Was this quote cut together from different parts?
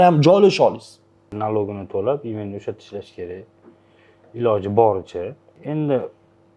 yes; 1 cut; at 1.3 s

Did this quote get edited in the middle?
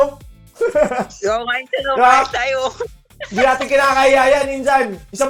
no; 0 cuts

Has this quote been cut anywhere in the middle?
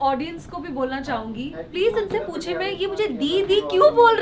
no; 0 cuts

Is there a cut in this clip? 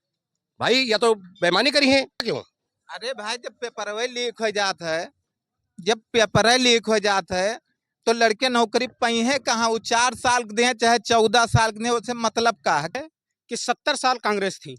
yes; 2 cuts; at 2.2 s, 12.9 s

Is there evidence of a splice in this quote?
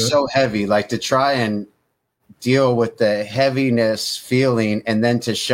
no; 0 cuts

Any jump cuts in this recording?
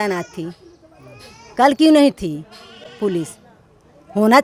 no; 0 cuts

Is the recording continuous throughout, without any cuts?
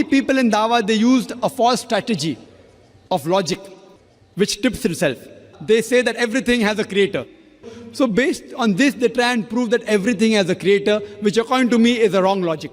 no; 2 cuts; at 5.5 s, 7.8 s

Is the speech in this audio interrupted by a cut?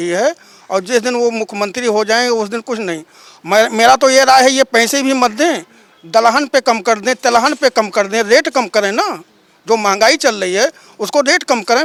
no; 0 cuts

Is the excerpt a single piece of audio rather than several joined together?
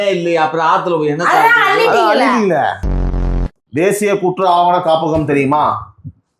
no; 1 cut; at 3.3 s

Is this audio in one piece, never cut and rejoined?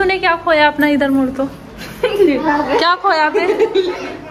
yes; 0 cuts

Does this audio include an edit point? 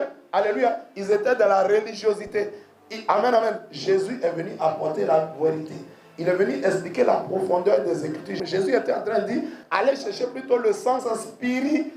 yes; 2 cuts; at 8.4 s, 9.6 s

